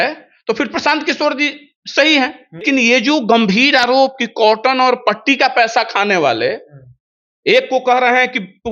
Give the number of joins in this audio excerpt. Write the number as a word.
one